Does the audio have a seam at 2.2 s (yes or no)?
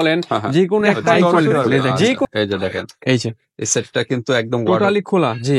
yes